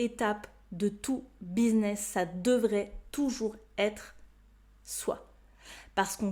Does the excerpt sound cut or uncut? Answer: uncut